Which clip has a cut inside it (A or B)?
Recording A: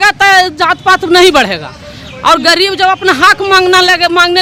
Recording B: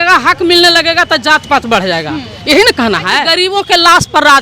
B